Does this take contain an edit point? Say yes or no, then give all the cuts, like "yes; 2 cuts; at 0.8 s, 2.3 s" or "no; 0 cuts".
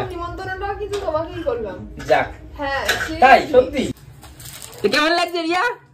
yes; 1 cut; at 3.9 s